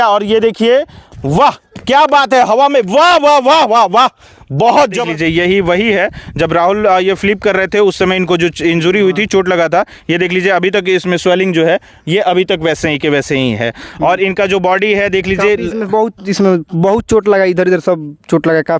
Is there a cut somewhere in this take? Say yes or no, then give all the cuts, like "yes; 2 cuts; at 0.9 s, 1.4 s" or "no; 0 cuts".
yes; 1 cut; at 5.0 s